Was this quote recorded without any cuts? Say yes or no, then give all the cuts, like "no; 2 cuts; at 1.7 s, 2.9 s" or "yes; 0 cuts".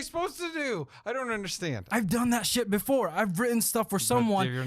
no; 1 cut; at 1.8 s